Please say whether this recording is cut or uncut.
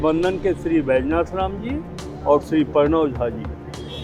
uncut